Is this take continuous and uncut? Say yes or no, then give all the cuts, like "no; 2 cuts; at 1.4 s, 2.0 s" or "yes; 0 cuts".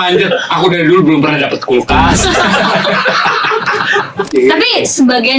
no; 1 cut; at 4.3 s